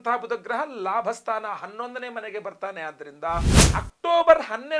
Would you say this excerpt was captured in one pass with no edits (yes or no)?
no